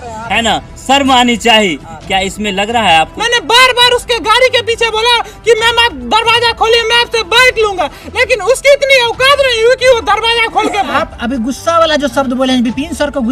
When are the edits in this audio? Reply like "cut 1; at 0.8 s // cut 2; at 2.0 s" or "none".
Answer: cut 1; at 3.2 s // cut 2; at 10.9 s